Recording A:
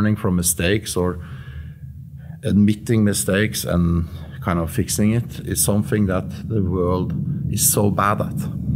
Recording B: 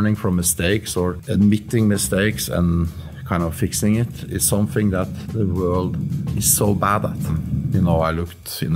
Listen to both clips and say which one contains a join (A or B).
B